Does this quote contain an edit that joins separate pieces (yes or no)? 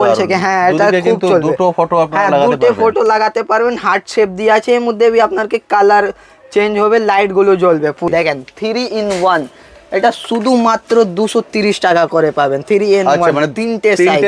yes